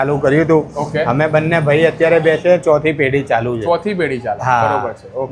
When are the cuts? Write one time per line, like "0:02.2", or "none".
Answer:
none